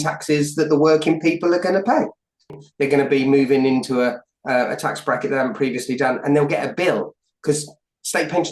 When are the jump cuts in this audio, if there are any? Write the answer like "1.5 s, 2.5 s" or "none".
2.7 s